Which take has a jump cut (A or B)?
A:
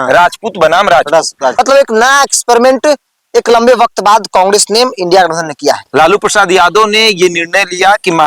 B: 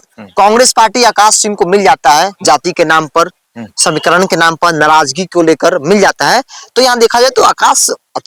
A